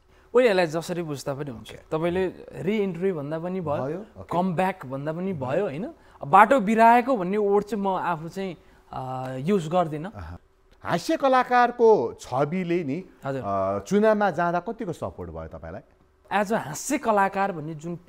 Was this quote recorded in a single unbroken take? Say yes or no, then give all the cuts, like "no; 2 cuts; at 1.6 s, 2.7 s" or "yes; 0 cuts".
no; 2 cuts; at 10.3 s, 16.2 s